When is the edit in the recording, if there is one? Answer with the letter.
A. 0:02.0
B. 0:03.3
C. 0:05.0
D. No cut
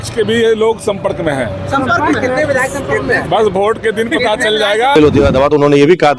C